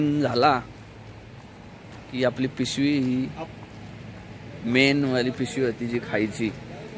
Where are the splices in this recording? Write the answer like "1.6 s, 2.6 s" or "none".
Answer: none